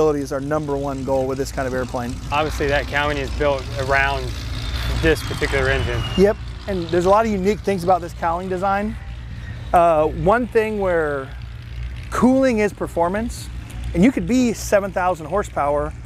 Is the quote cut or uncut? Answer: uncut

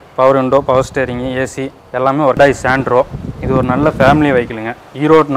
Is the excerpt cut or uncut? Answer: cut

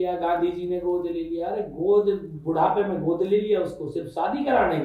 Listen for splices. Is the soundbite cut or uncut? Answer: uncut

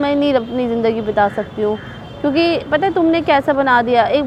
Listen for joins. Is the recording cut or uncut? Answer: uncut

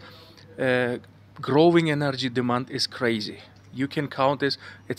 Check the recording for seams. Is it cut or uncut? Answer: uncut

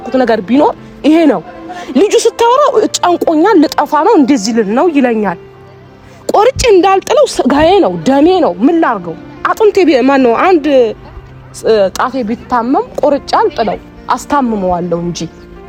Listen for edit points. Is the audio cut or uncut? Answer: uncut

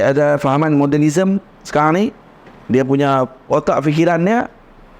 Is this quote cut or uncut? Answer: uncut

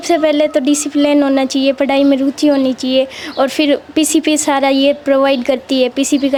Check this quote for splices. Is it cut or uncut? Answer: uncut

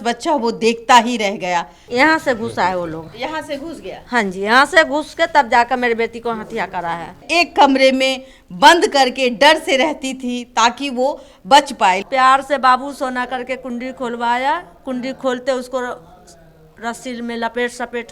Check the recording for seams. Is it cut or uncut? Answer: cut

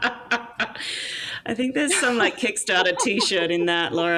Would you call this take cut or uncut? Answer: uncut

